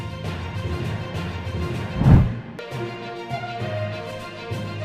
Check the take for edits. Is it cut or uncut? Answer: cut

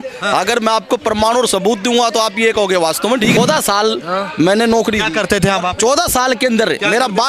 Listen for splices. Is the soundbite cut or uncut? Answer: cut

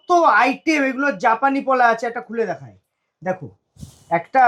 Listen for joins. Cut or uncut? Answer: uncut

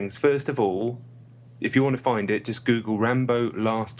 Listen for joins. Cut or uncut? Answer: uncut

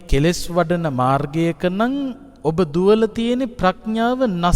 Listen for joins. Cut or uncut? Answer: cut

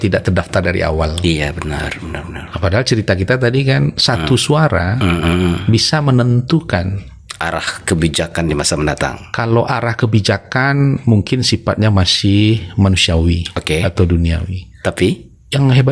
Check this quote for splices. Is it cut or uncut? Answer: uncut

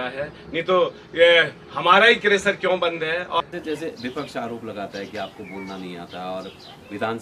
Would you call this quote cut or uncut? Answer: cut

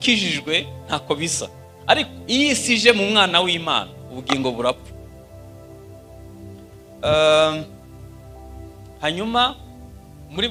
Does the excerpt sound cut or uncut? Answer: uncut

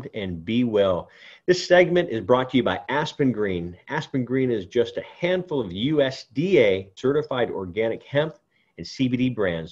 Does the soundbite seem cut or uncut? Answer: cut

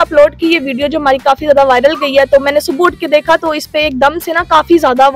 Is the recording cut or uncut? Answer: uncut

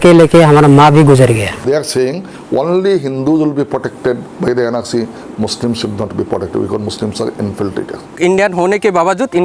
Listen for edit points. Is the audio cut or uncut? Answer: cut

